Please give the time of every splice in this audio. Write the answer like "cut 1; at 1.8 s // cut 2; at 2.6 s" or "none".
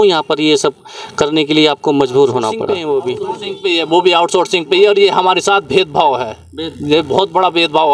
cut 1; at 3.1 s